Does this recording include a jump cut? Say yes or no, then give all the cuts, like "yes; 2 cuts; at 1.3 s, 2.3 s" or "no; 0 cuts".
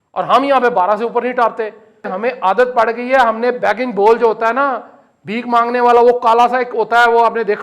yes; 1 cut; at 2.1 s